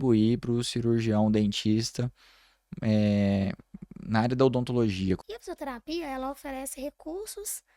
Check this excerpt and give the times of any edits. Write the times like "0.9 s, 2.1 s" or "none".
5.2 s